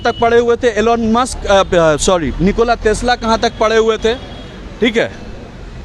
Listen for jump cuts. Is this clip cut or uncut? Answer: uncut